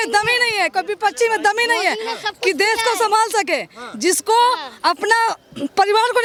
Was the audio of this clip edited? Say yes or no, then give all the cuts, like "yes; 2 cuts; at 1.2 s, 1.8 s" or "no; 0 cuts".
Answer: no; 0 cuts